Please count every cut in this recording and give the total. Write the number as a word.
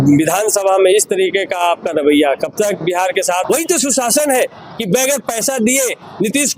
one